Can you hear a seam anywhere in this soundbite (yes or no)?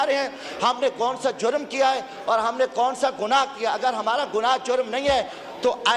no